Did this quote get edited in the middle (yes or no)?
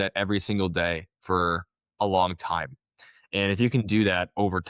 no